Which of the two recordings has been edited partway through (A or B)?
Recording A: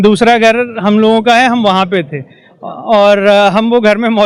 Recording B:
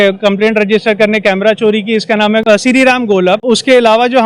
B